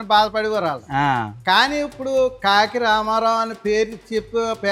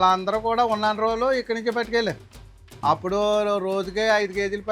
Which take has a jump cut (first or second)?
second